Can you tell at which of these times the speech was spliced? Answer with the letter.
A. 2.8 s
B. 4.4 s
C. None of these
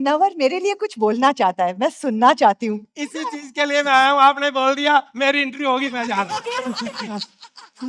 A